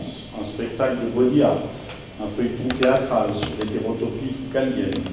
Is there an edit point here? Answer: no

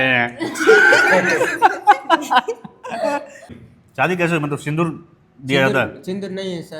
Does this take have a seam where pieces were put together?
yes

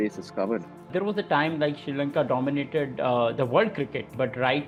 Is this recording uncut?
yes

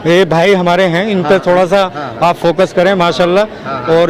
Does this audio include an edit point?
no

